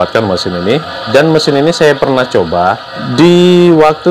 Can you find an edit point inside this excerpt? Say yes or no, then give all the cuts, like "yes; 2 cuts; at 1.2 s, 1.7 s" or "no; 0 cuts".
yes; 2 cuts; at 1.0 s, 2.9 s